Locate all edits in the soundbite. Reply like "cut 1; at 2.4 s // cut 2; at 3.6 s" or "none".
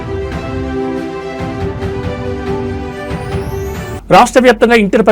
cut 1; at 3.9 s